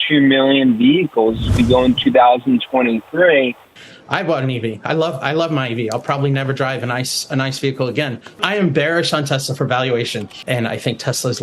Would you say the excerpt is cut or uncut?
cut